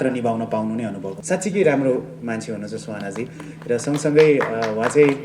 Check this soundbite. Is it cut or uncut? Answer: cut